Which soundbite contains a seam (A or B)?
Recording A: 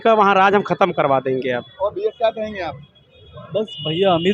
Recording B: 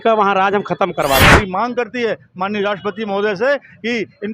B